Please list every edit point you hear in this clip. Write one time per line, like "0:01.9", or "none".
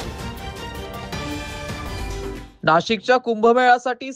0:02.3

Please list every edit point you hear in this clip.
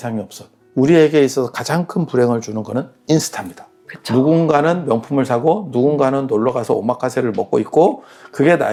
none

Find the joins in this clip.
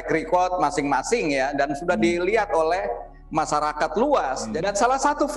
0:04.5

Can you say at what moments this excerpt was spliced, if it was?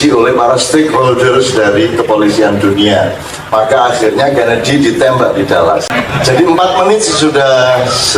0:06.0

